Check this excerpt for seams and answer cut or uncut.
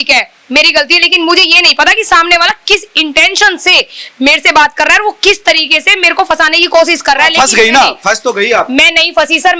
uncut